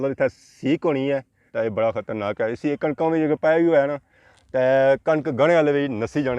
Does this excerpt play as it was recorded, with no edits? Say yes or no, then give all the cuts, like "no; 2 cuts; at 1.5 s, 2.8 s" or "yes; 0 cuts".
no; 1 cut; at 1.4 s